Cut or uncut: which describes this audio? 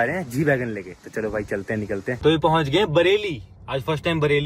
cut